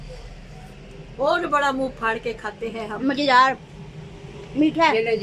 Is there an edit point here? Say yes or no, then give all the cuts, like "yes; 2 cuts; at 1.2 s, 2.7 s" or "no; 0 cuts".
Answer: yes; 1 cut; at 1.4 s